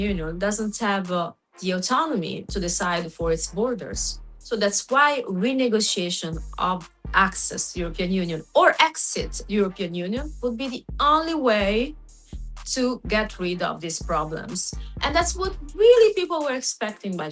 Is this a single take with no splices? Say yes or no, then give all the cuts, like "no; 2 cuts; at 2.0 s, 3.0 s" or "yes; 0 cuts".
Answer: yes; 0 cuts